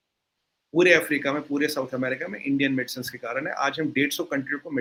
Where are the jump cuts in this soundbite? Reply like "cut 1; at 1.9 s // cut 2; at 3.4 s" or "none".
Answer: none